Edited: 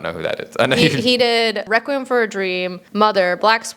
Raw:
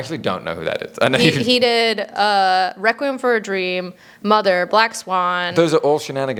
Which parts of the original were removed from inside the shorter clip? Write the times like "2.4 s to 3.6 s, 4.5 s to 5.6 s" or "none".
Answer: 2.0 s to 2.8 s, 3.9 s to 4.1 s